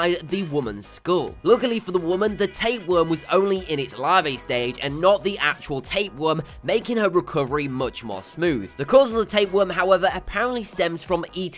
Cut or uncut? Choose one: cut